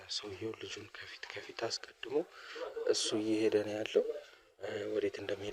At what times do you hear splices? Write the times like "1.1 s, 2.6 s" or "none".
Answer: none